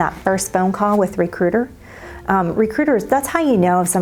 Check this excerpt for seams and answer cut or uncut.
uncut